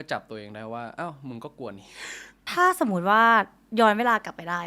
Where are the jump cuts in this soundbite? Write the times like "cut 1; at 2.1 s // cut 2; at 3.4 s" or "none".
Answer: cut 1; at 2.3 s